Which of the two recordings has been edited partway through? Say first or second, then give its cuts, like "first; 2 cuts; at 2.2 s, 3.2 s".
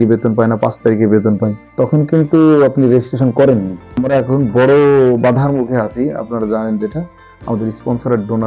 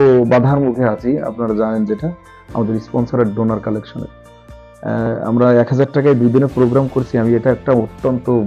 first; 2 cuts; at 1.6 s, 4.0 s